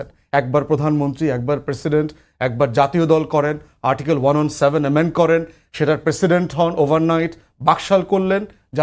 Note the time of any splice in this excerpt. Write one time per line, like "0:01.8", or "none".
none